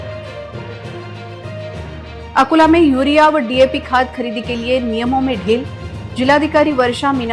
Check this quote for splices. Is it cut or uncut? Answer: cut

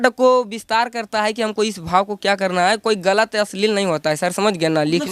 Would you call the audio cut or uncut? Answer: uncut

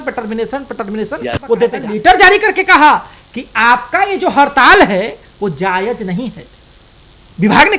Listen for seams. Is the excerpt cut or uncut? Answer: cut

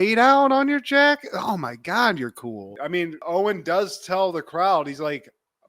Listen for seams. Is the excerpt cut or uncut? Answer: cut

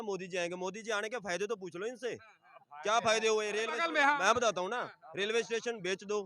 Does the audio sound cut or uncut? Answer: cut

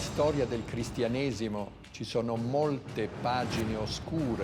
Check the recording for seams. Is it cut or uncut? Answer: uncut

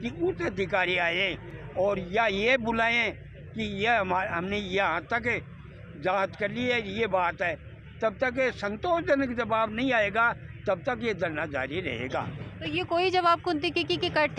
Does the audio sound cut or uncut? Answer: uncut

